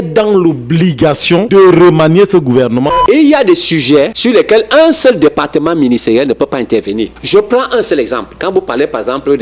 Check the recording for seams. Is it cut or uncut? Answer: cut